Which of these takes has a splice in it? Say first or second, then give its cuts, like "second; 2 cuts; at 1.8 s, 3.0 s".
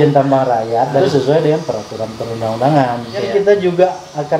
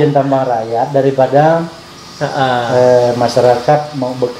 first; 2 cuts; at 1.0 s, 3.3 s